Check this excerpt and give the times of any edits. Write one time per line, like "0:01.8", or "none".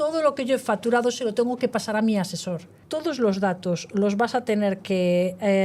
0:02.8

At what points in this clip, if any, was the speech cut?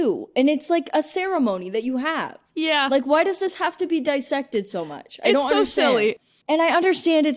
0:06.3

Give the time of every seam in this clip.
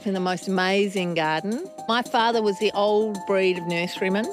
0:01.9

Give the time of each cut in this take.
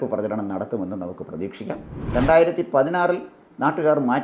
0:01.9

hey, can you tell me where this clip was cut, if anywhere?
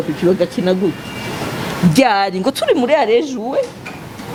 none

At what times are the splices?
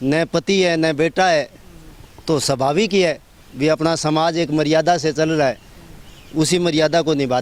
none

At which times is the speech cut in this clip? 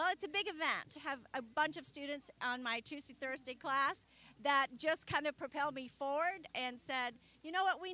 none

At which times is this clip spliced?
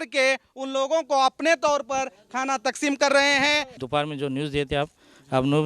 0:03.8

